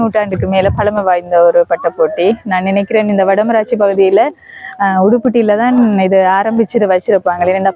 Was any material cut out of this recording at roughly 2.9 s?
no; 0 cuts

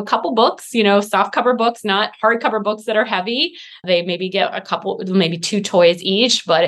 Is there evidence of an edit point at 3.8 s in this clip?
yes; 1 cut; at 3.8 s

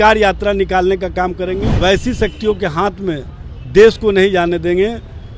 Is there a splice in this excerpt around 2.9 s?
no; 1 cut; at 1.7 s

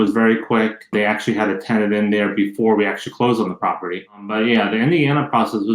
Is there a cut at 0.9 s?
yes; 2 cuts; at 0.9 s, 4.3 s

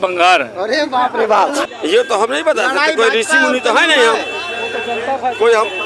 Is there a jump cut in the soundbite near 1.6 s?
yes; 1 cut; at 1.6 s

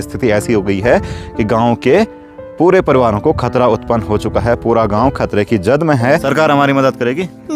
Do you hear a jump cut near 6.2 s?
yes; 1 cut; at 6.2 s

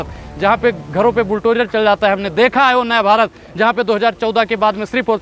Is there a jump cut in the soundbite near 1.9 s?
no; 0 cuts

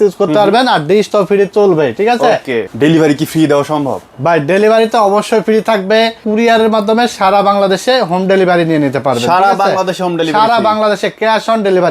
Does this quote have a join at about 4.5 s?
no; 2 cuts; at 2.6 s, 6.2 s

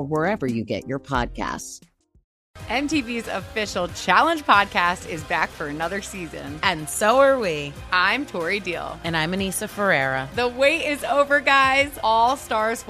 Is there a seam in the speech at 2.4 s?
yes; 1 cut; at 2.4 s

